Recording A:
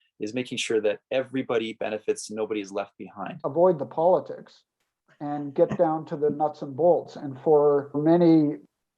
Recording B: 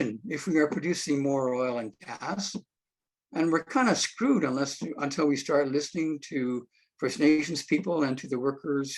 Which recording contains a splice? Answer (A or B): A